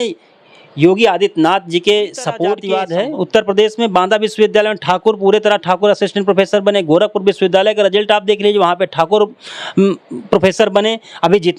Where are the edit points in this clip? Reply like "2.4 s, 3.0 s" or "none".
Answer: 2.6 s